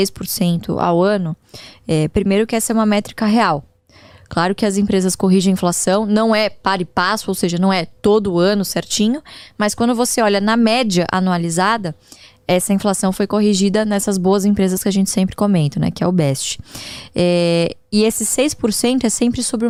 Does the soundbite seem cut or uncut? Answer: uncut